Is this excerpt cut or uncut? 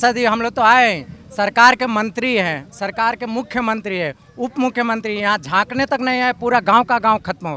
uncut